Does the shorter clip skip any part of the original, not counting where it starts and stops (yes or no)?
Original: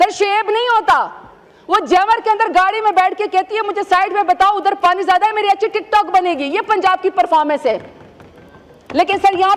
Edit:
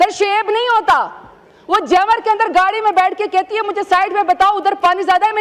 no